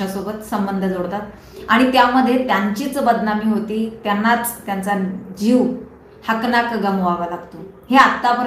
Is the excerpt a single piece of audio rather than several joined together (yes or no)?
yes